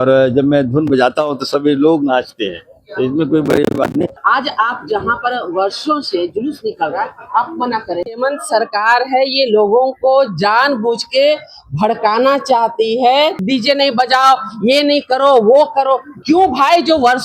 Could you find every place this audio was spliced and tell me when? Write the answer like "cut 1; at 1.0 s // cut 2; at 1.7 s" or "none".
cut 1; at 4.2 s // cut 2; at 8.0 s // cut 3; at 13.4 s